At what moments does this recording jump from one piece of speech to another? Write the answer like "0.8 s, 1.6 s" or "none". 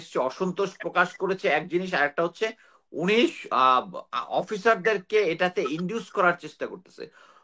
none